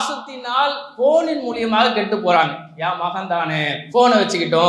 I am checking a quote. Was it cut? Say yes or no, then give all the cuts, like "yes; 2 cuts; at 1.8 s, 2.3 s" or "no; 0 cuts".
yes; 1 cut; at 3.8 s